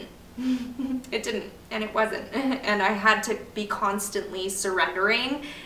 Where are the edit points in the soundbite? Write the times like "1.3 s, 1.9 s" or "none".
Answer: none

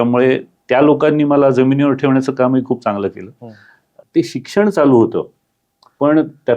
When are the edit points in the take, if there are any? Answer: 4.0 s

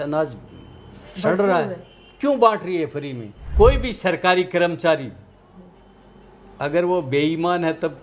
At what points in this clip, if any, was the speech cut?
3.5 s

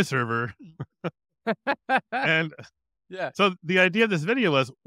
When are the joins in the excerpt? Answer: none

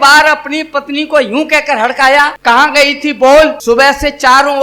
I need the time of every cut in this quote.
2.3 s, 3.6 s

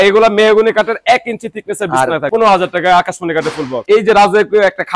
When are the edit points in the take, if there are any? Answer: 2.3 s, 3.8 s

